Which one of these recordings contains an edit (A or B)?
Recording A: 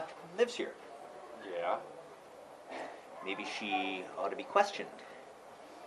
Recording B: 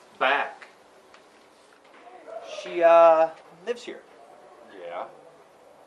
B